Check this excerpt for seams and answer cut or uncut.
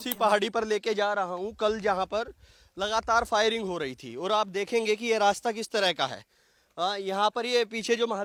uncut